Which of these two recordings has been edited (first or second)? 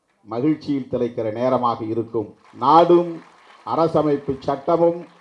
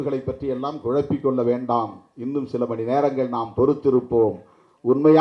first